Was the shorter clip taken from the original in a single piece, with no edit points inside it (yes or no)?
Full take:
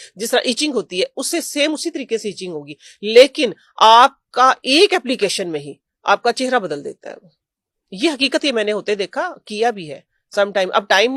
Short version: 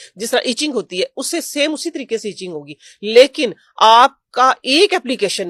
yes